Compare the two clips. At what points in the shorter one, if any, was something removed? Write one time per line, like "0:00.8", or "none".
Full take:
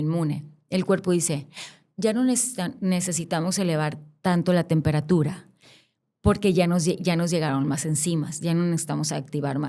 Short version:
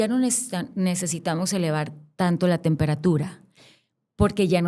none